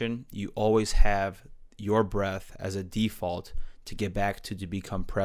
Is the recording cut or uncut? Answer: uncut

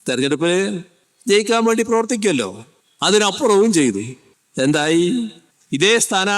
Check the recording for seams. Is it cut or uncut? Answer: uncut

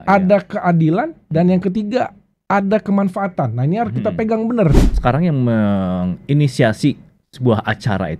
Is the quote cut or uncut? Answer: cut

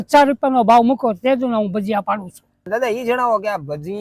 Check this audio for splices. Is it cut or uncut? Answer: cut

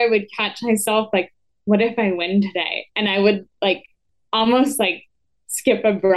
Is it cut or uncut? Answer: uncut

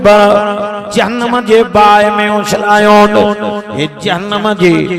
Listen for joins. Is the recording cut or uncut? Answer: uncut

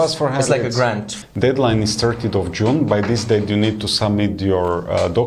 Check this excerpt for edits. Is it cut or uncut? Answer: cut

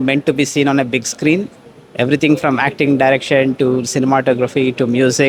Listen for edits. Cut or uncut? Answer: uncut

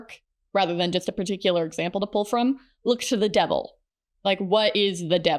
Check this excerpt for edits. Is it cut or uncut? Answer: cut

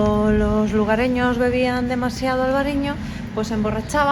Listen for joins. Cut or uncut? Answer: uncut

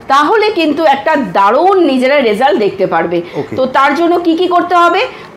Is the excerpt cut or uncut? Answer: uncut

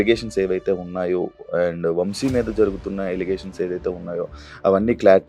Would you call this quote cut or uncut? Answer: uncut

